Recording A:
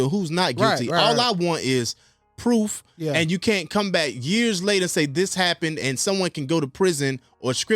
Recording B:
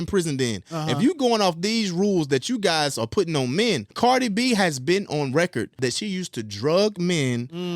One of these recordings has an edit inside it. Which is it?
B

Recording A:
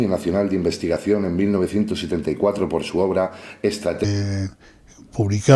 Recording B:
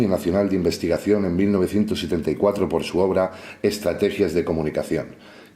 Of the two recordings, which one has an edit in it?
B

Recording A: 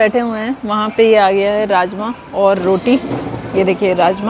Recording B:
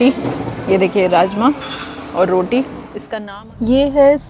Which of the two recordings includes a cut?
B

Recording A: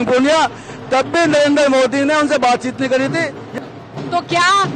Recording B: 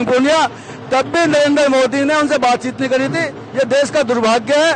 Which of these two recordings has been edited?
A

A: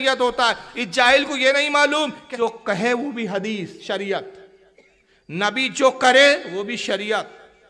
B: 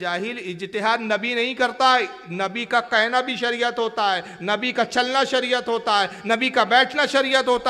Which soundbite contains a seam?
A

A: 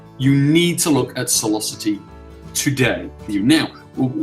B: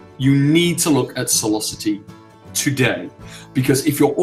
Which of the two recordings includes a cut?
A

